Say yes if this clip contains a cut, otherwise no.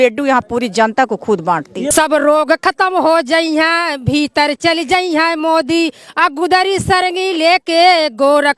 yes